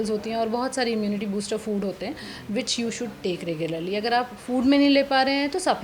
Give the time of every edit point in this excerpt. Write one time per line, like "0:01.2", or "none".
none

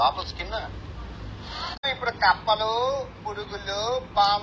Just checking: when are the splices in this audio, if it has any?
0:01.8

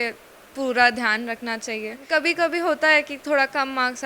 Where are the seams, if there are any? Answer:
0:02.0

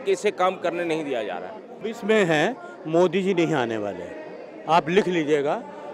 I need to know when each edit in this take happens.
0:01.8

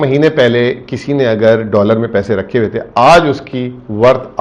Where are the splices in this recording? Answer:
none

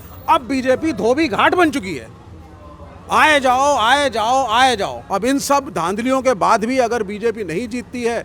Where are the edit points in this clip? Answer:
0:05.0

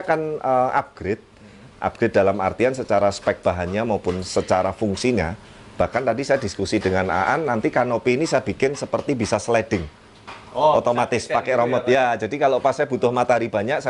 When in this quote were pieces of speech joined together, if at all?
none

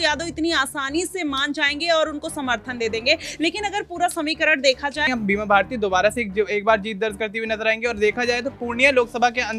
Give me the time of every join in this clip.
0:05.0

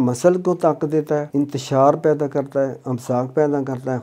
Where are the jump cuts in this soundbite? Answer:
0:01.3

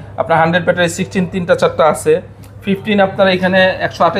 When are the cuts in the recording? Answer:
none

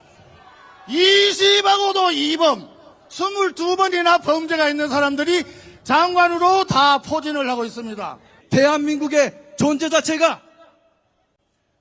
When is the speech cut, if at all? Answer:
0:08.3

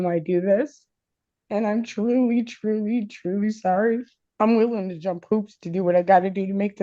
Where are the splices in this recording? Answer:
0:04.2

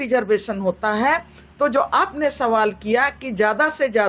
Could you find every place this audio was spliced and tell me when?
none

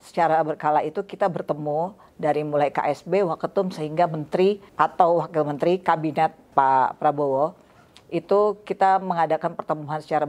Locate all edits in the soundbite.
0:04.7
0:06.5

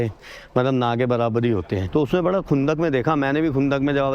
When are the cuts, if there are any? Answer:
0:01.8

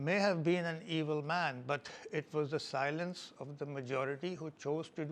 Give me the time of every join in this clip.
none

